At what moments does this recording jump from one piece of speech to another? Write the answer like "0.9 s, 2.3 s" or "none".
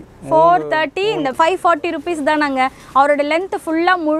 1.3 s